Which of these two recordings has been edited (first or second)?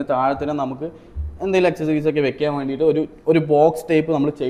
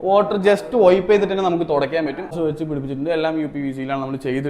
second